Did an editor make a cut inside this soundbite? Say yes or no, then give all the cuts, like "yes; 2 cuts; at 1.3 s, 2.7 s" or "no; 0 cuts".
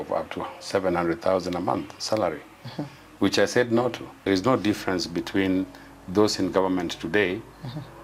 yes; 1 cut; at 4.3 s